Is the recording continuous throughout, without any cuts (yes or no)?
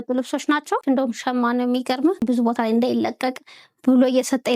no